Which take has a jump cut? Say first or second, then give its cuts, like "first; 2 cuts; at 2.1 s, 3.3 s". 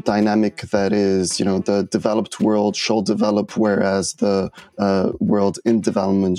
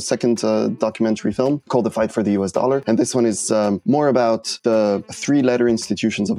second; 4 cuts; at 1.6 s, 2.8 s, 3.8 s, 4.9 s